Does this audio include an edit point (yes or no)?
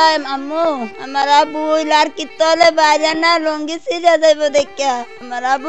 no